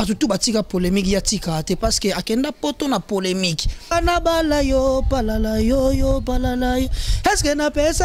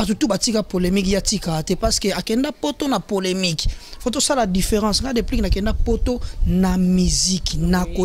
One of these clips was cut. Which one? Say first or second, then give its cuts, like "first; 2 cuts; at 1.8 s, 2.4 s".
first; 1 cut; at 3.9 s